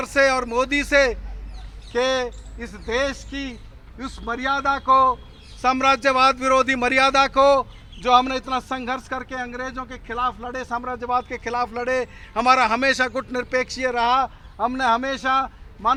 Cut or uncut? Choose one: uncut